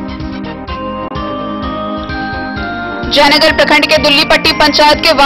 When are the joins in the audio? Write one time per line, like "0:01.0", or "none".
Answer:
none